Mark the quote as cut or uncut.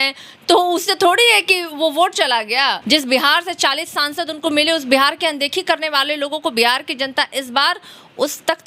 cut